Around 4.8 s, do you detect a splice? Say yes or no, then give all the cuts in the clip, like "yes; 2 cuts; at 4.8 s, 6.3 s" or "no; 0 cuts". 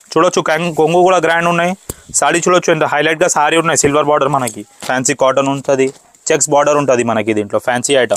yes; 1 cut; at 4.8 s